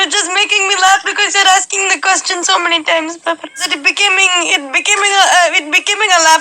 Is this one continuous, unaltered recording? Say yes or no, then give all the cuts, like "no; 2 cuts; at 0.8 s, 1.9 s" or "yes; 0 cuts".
no; 1 cut; at 3.7 s